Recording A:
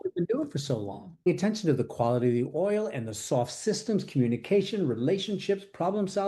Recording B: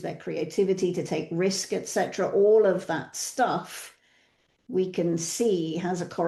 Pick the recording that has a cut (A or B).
A